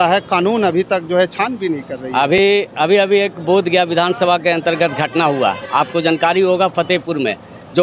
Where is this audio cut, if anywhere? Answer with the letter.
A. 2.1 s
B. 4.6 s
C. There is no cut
C